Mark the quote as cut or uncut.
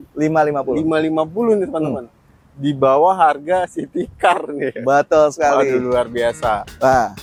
uncut